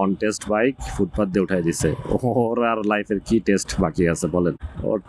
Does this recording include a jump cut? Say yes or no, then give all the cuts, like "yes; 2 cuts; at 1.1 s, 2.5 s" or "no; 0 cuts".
no; 0 cuts